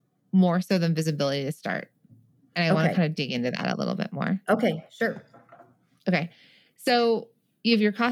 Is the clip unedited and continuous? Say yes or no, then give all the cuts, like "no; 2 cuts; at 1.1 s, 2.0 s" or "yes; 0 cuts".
yes; 0 cuts